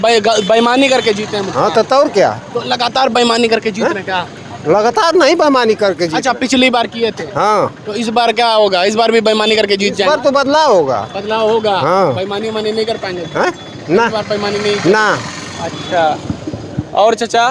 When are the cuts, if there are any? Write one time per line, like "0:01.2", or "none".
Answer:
none

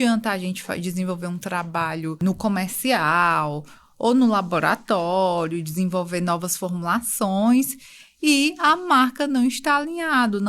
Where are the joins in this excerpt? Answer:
0:02.2

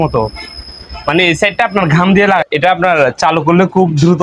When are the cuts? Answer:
0:02.5

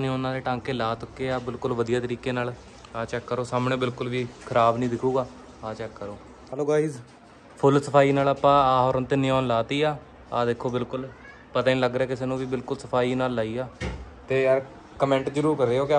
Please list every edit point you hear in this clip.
0:06.4
0:14.1

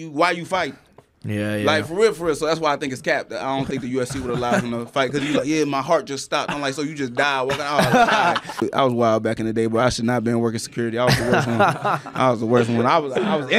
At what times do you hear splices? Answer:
0:08.6

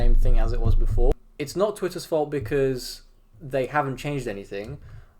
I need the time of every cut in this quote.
0:01.1

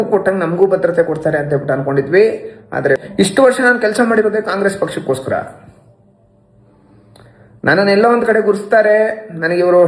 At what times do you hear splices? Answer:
0:03.0

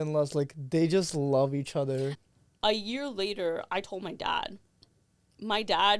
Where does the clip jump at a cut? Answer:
0:02.1

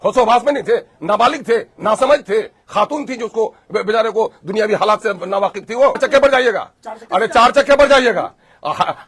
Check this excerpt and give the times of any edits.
0:06.0

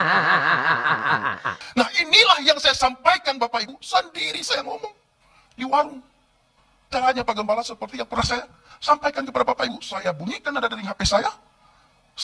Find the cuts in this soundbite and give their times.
0:01.6

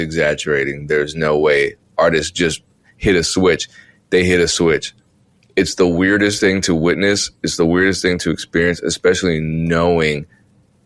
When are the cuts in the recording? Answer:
none

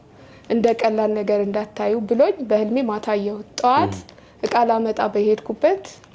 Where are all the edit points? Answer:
none

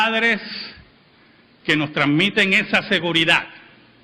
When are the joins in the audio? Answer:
none

